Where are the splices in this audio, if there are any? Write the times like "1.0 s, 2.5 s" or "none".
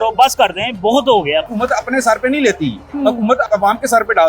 1.5 s, 3.4 s